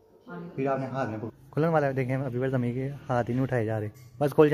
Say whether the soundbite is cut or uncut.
cut